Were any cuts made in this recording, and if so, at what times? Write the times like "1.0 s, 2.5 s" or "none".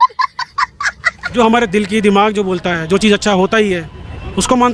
1.2 s